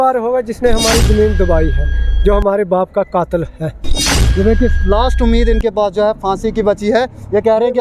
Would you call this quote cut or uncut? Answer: uncut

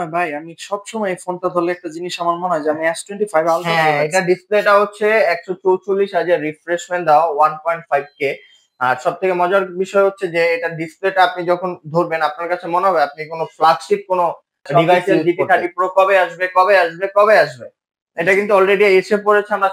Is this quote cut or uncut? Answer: cut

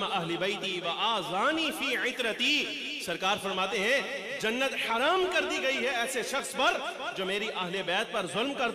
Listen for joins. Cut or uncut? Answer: uncut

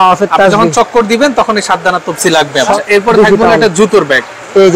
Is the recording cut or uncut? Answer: cut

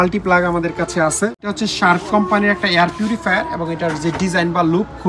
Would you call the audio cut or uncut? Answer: cut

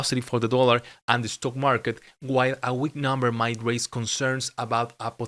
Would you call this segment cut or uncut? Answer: uncut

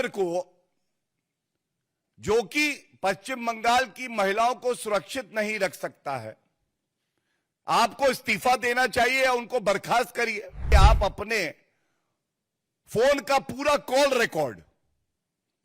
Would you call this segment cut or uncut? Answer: cut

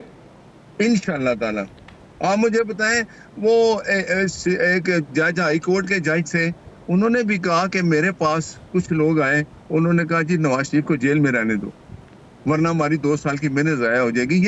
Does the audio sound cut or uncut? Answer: uncut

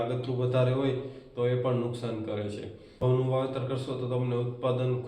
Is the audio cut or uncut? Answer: cut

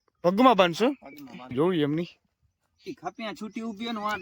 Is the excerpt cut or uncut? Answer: cut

